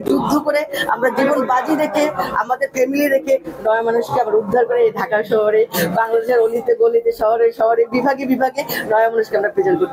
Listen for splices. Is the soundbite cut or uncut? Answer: uncut